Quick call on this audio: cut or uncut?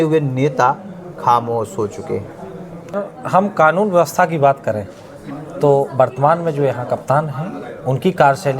cut